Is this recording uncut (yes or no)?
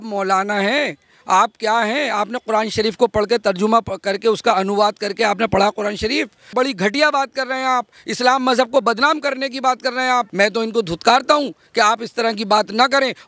no